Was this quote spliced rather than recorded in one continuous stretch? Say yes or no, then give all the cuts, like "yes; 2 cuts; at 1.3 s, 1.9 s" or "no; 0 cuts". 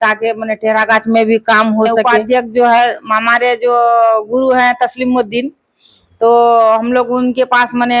yes; 1 cut; at 2.2 s